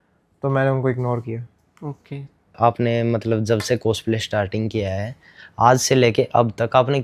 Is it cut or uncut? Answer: cut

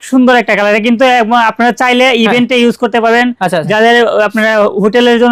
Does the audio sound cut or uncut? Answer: uncut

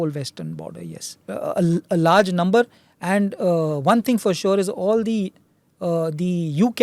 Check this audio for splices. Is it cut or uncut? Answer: cut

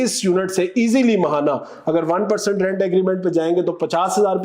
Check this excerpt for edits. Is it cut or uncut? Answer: uncut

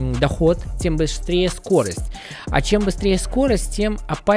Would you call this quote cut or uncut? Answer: uncut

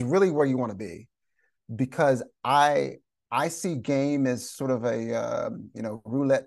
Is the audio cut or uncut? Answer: uncut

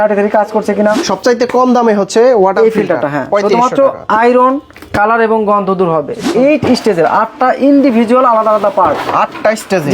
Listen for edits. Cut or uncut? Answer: cut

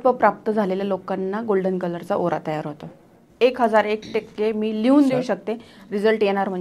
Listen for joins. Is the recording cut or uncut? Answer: cut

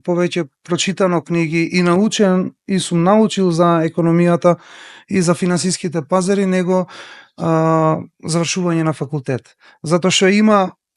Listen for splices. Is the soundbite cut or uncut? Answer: uncut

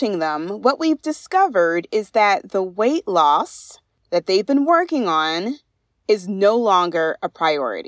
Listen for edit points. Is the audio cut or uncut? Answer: uncut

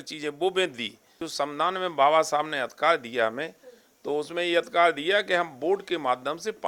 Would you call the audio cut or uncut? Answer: cut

